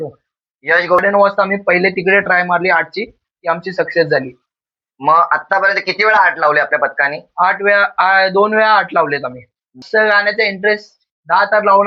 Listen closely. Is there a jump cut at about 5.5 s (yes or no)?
no